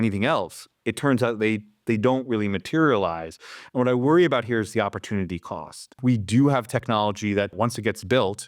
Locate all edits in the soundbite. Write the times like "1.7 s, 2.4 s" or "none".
6.0 s, 7.5 s